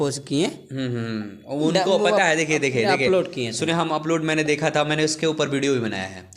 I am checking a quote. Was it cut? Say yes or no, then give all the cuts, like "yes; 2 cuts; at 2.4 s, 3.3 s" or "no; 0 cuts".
no; 0 cuts